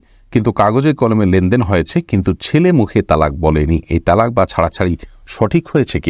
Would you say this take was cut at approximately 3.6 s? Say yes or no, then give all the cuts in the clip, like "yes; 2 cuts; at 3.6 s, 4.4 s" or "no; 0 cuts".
no; 0 cuts